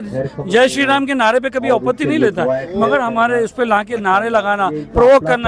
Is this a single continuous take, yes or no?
yes